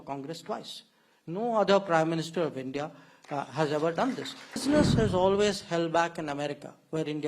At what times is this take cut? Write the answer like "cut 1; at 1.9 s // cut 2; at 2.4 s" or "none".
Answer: cut 1; at 4.6 s